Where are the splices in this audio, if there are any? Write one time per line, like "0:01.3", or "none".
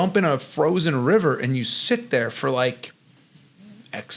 none